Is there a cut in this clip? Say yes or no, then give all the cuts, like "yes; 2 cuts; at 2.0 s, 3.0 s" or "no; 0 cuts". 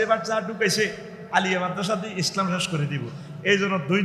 no; 0 cuts